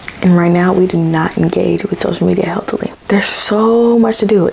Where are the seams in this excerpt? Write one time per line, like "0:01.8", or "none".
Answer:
0:02.9